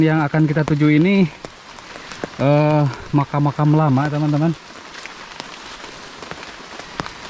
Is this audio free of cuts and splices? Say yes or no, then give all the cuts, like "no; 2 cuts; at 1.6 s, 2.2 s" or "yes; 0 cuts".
yes; 0 cuts